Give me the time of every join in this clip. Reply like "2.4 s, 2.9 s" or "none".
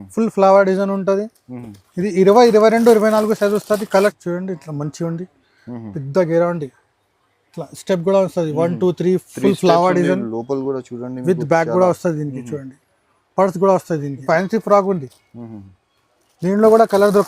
3.8 s, 14.2 s